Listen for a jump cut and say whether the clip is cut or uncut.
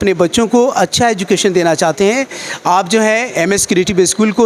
uncut